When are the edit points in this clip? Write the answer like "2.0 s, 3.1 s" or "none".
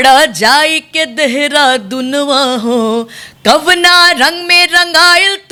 none